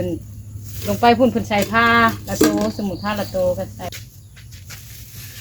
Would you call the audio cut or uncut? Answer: cut